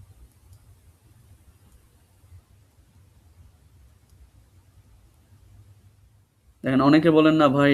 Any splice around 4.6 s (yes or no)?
no